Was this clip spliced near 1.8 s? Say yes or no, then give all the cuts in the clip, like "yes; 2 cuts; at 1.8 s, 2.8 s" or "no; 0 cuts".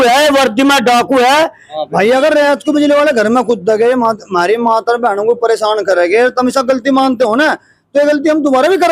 yes; 1 cut; at 1.8 s